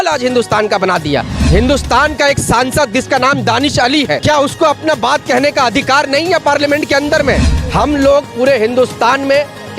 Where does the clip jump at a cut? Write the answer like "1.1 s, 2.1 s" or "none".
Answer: 1.3 s, 4.2 s, 7.6 s